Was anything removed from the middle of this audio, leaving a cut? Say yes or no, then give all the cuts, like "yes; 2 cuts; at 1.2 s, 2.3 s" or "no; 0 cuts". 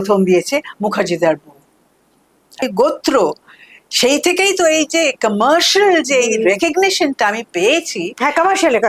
yes; 1 cut; at 2.7 s